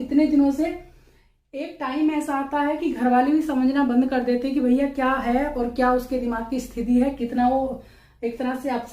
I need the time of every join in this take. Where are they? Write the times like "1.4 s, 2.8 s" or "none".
none